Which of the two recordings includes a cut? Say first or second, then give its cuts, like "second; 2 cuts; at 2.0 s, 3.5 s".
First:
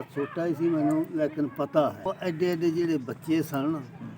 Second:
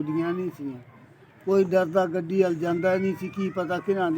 first; 1 cut; at 2.0 s